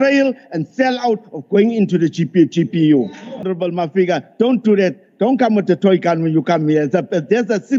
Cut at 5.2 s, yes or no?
no